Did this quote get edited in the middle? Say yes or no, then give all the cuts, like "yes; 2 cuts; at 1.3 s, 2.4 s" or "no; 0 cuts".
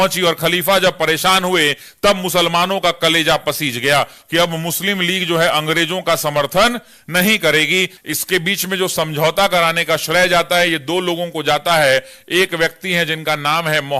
yes; 2 cuts; at 4.2 s, 7.9 s